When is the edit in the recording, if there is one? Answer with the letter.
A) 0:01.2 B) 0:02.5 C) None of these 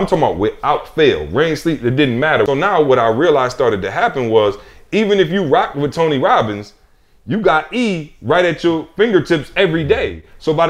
B